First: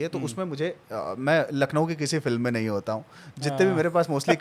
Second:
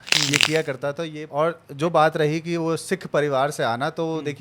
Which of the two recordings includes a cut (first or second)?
second